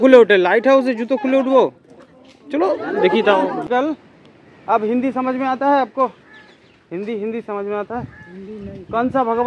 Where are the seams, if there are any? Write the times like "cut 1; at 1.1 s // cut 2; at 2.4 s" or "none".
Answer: cut 1; at 3.6 s